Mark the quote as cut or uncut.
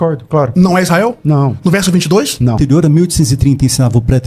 cut